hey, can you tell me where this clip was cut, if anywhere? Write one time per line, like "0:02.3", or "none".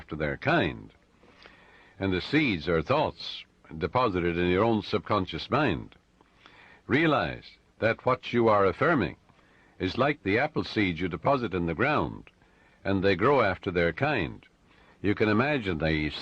0:02.9